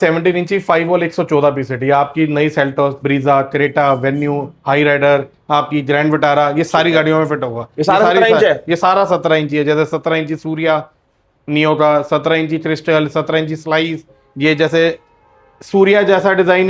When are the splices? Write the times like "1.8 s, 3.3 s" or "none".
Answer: none